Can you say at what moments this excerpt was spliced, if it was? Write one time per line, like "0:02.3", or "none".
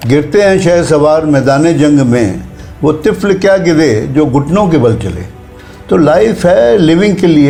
none